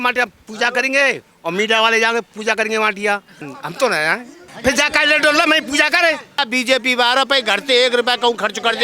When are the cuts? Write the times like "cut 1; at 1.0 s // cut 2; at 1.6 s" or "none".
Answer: cut 1; at 3.4 s // cut 2; at 4.4 s // cut 3; at 6.4 s